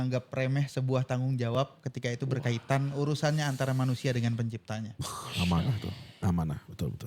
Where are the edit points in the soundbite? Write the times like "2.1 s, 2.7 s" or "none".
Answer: none

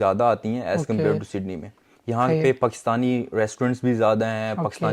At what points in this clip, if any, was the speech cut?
none

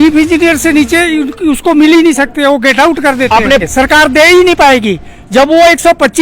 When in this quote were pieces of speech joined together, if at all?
3.6 s

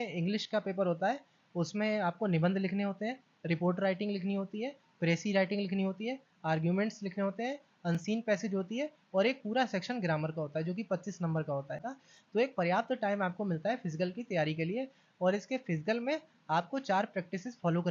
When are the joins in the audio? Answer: 12.0 s

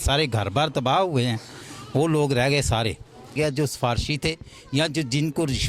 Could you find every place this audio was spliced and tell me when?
3.4 s

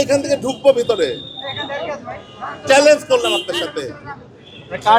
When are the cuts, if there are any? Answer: none

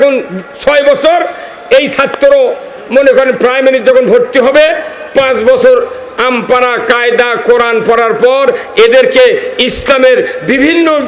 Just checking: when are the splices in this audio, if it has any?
none

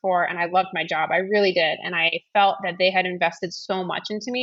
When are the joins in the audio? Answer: none

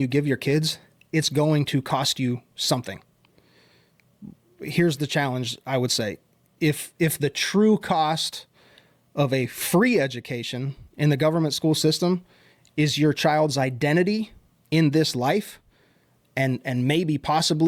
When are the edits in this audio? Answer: none

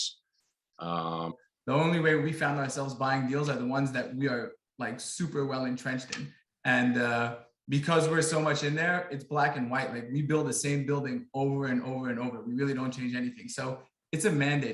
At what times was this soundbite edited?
1.3 s

